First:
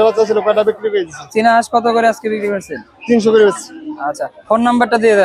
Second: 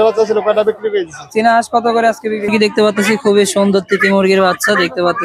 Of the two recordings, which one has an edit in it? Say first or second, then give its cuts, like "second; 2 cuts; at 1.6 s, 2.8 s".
second; 1 cut; at 2.5 s